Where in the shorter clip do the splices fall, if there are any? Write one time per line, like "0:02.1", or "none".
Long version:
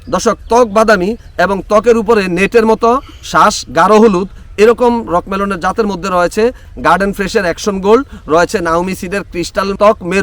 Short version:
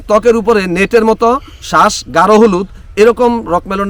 none

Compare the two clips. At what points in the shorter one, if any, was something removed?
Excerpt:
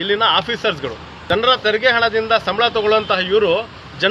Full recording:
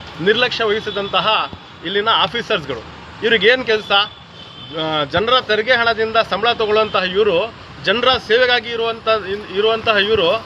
0:01.2

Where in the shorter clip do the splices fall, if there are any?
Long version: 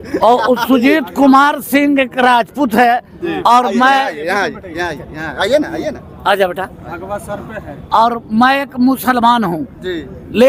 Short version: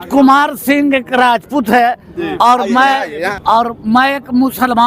0:03.4

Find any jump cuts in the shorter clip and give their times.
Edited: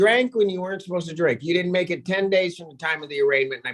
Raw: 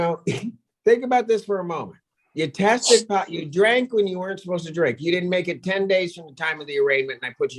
none

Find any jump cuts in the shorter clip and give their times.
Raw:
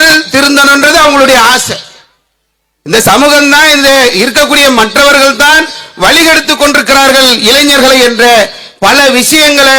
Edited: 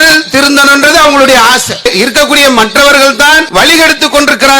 0:01.9
0:03.4

